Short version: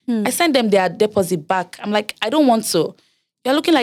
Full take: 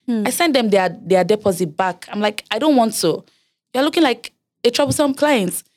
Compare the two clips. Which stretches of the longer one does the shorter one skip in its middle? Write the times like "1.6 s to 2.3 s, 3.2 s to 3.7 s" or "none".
1.0 s to 1.3 s